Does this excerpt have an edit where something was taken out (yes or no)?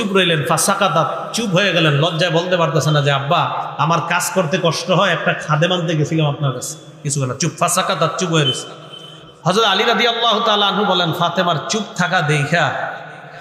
no